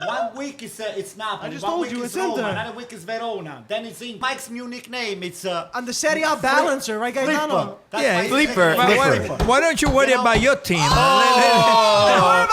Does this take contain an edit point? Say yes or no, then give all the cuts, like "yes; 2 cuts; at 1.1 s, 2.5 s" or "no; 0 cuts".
yes; 1 cut; at 4.2 s